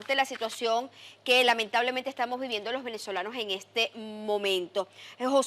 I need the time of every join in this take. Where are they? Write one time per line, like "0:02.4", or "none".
0:04.5